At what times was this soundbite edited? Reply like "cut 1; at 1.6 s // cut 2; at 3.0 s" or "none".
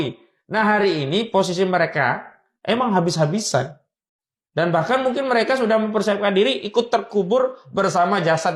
none